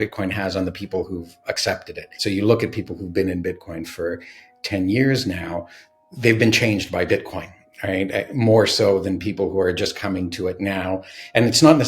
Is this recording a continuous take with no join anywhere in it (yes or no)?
no